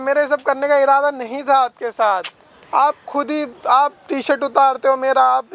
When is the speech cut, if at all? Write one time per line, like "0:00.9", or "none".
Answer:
none